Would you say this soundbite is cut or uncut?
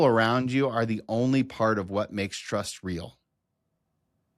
uncut